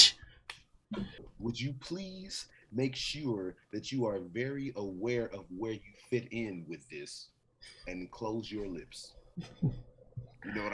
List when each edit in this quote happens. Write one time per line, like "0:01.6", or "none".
0:01.3